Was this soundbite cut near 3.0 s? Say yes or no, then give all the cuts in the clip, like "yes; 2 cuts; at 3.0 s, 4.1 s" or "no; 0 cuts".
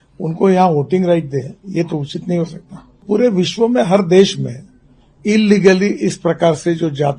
yes; 1 cut; at 3.0 s